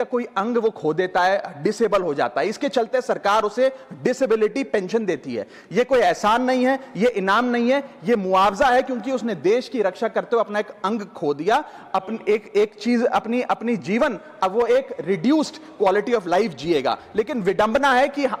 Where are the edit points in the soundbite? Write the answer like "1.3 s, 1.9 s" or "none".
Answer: none